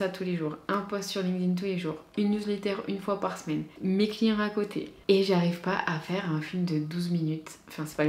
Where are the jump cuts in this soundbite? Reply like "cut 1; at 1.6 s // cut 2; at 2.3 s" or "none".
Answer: cut 1; at 3.7 s

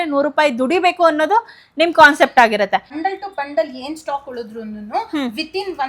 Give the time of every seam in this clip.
cut 1; at 3.0 s

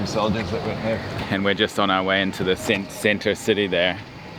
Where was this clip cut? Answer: cut 1; at 1.2 s

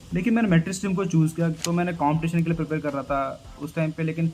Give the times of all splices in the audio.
cut 1; at 1.6 s

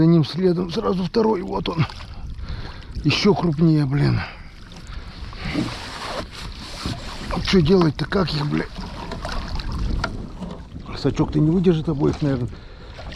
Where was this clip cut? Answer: none

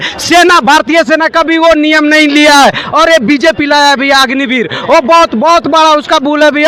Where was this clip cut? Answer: none

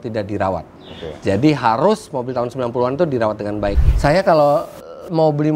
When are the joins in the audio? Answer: cut 1; at 3.8 s

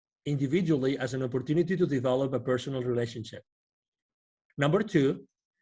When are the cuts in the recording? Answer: cut 1; at 4.4 s

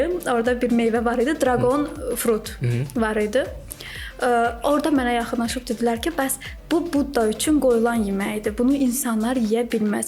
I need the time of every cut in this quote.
none

